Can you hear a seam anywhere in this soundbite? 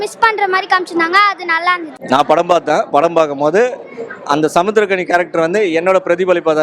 yes; 1 cut; at 1.9 s

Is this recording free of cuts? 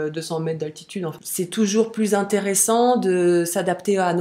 no; 1 cut; at 1.1 s

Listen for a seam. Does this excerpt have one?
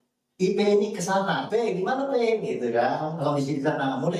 yes; 1 cut; at 1.4 s

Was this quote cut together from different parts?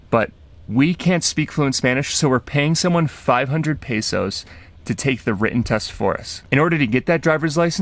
yes; 1 cut; at 6.3 s

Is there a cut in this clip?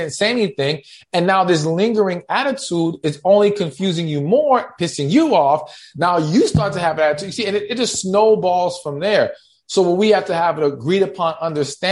no; 0 cuts

